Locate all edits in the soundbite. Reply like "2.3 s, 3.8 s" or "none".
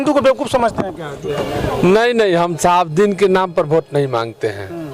1.2 s